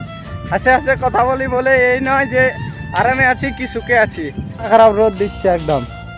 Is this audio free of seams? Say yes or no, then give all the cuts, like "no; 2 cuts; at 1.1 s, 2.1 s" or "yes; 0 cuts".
no; 1 cut; at 4.7 s